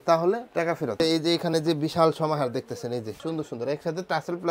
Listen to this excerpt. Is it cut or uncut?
cut